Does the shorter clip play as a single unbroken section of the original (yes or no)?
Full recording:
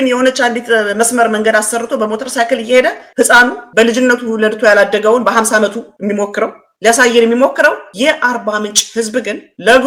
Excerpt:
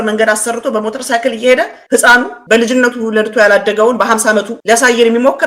no